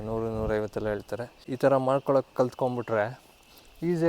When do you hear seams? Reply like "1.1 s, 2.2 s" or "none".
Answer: 1.4 s

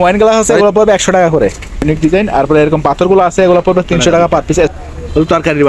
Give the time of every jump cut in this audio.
1.8 s, 4.7 s

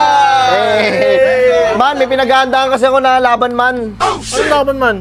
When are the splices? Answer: none

